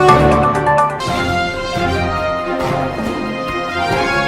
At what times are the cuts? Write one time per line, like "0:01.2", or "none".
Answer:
none